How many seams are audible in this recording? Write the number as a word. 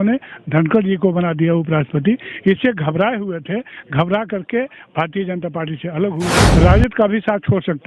one